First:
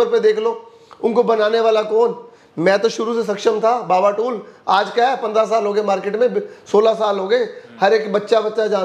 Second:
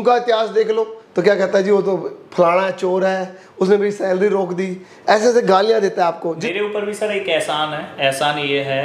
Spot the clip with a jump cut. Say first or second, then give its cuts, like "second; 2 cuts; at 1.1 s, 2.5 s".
second; 2 cuts; at 1.0 s, 6.4 s